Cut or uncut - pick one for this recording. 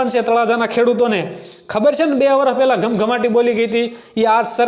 uncut